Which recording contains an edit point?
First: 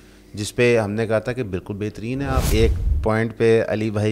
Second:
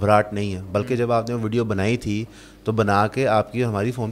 first; 1 cut; at 2.5 s

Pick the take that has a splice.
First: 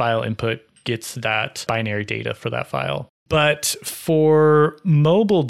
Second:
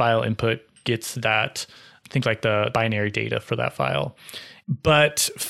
first; 2 cuts; at 1.6 s, 3.2 s

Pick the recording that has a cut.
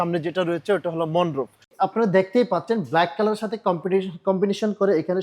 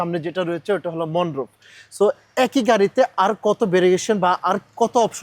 first; 1 cut; at 1.7 s

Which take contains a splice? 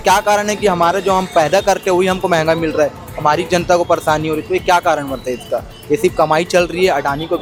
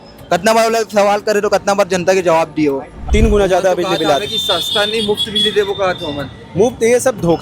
second; 1 cut; at 3.0 s

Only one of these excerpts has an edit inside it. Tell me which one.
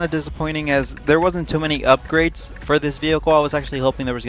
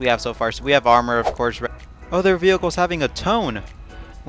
second; 1 cut; at 1.6 s

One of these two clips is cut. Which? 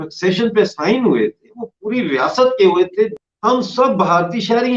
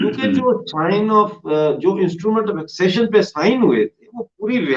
first; 1 cut; at 3.2 s

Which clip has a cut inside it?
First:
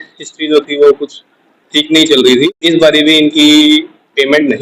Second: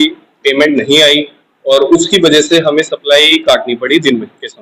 first; 1 cut; at 2.5 s

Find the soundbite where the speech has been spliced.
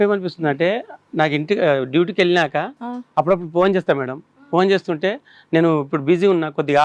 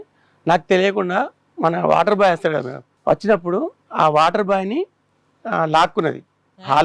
second; 1 cut; at 2.9 s

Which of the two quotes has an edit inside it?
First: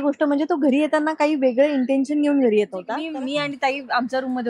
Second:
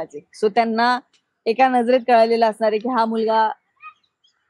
first; 1 cut; at 3.1 s

